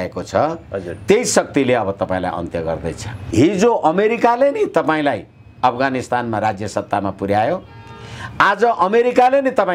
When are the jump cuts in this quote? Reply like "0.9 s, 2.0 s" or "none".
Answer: 3.2 s